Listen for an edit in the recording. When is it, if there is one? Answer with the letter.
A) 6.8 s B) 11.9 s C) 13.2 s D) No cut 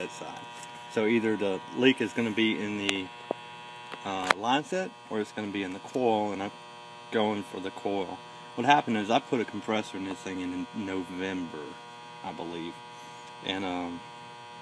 A